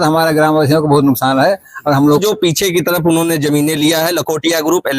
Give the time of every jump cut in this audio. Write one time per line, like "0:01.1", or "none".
0:02.2